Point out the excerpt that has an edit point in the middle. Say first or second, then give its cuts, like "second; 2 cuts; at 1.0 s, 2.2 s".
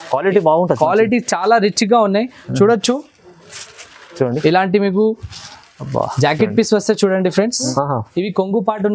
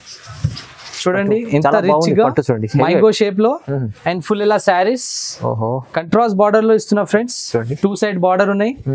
first; 1 cut; at 7.7 s